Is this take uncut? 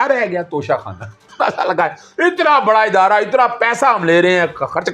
yes; 0 cuts

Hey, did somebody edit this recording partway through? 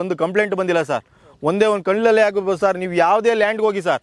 no; 0 cuts

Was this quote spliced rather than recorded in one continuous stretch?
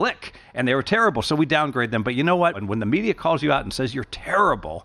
yes; 1 cut; at 2.6 s

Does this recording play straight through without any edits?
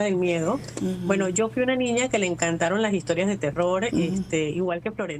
yes; 0 cuts

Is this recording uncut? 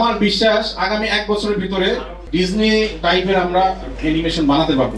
no; 2 cuts; at 2.1 s, 3.0 s

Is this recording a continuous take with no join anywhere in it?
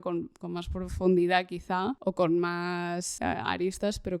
no; 2 cuts; at 2.0 s, 3.1 s

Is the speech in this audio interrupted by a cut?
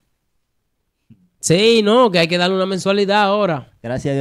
no; 0 cuts

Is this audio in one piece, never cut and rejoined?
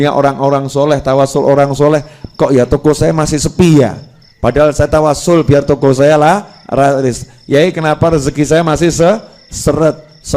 yes; 0 cuts

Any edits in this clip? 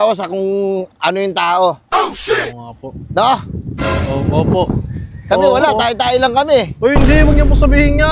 no; 0 cuts

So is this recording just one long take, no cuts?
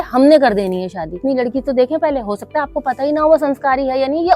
no; 1 cut; at 1.2 s

